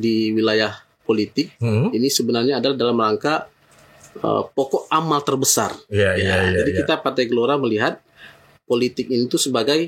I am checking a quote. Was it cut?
no; 0 cuts

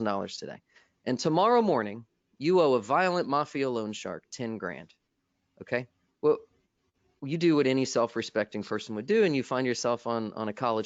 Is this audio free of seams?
yes; 0 cuts

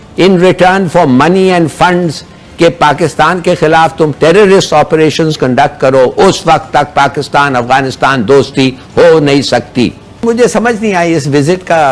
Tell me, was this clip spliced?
yes; 1 cut; at 10.2 s

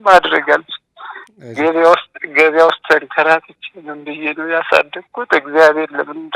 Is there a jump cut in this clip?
no; 0 cuts

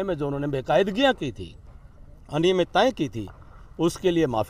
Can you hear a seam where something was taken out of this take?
no; 0 cuts

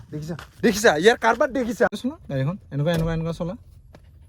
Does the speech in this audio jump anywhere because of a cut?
yes; 1 cut; at 1.9 s

